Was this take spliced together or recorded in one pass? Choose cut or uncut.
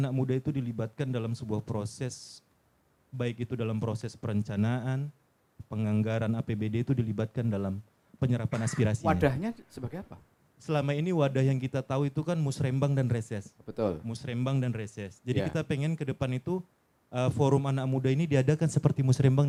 uncut